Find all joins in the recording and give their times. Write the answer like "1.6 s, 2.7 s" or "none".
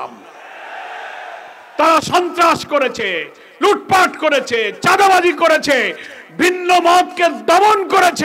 1.7 s